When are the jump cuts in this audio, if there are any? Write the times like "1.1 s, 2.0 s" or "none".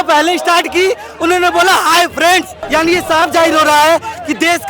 2.6 s